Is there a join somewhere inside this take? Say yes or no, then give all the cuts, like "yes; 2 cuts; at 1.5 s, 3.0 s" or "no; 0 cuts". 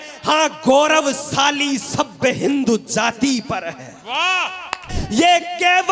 yes; 1 cut; at 5.0 s